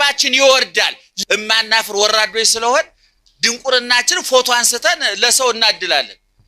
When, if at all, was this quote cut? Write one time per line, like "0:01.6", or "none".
0:01.1

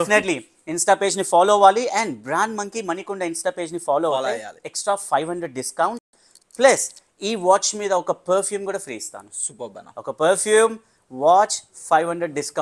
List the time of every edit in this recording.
none

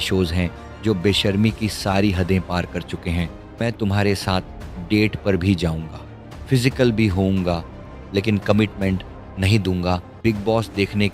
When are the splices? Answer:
0:03.6
0:10.2

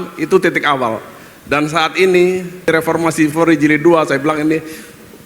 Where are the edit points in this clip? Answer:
0:02.7

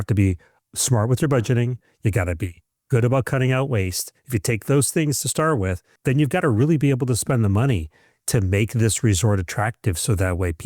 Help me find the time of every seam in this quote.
none

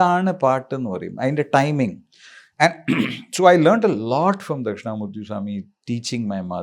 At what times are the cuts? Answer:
none

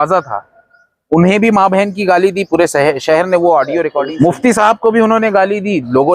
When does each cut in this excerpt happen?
0:04.0

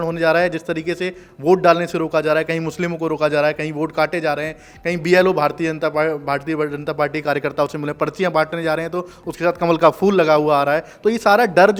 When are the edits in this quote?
none

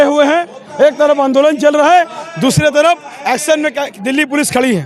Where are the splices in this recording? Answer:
none

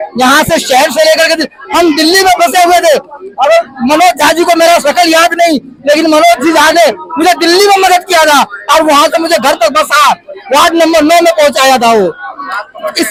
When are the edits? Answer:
none

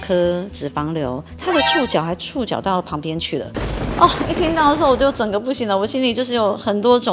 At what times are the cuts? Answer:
none

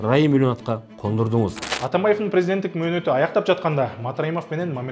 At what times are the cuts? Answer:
0:01.7

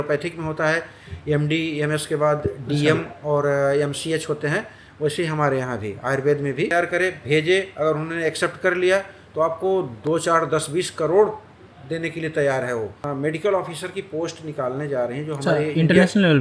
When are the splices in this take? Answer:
0:06.7
0:13.0

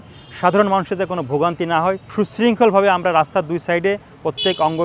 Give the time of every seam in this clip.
0:02.0

